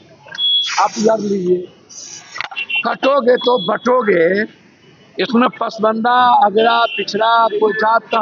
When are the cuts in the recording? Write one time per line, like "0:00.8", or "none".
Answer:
none